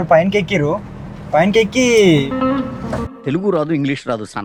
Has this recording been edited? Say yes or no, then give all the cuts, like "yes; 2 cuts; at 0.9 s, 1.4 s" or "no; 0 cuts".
no; 0 cuts